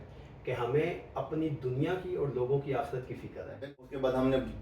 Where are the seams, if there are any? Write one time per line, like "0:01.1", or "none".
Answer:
0:03.5